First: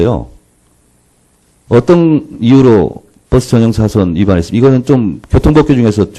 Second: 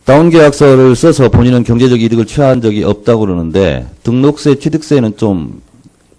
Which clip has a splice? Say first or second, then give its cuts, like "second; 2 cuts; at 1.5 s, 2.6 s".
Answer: first; 1 cut; at 3.8 s